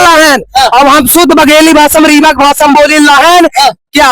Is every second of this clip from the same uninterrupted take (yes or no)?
yes